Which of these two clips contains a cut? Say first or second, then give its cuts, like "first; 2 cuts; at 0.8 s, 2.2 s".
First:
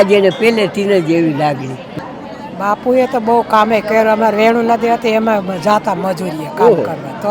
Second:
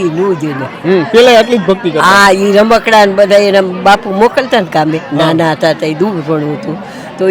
first; 1 cut; at 1.9 s